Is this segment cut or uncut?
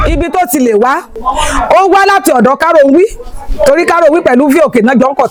uncut